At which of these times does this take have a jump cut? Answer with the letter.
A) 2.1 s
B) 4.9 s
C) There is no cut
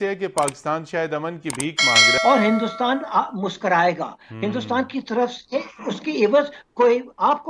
A